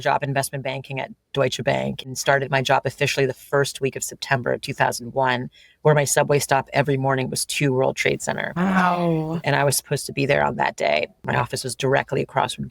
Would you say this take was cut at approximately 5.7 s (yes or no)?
no